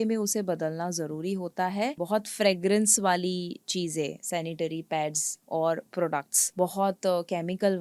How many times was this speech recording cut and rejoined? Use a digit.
2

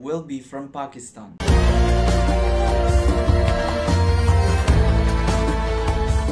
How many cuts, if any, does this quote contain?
1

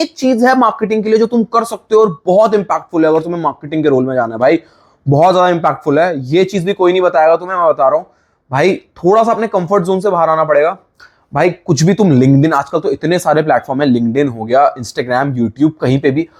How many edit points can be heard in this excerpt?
0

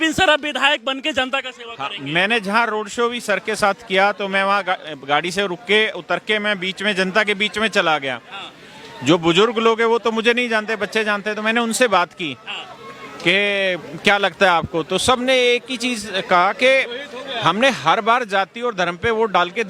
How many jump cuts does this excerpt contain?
0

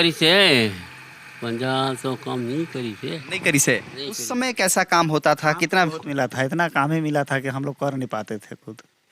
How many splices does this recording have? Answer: 1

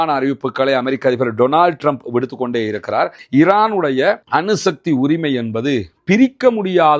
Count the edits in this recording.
1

